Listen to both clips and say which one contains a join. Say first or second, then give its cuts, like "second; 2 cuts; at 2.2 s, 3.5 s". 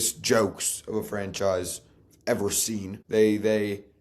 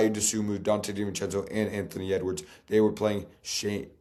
first; 1 cut; at 2.9 s